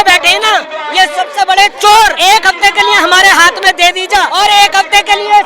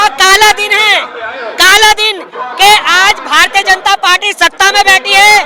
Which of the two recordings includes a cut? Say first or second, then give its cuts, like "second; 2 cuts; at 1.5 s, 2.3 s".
first; 2 cuts; at 2.2 s, 4.3 s